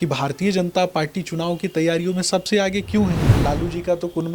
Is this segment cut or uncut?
cut